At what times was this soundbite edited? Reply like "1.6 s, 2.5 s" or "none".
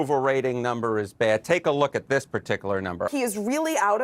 3.1 s